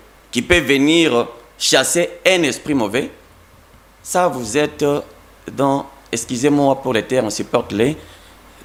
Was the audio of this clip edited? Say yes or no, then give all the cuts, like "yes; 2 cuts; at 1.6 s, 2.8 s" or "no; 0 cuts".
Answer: no; 0 cuts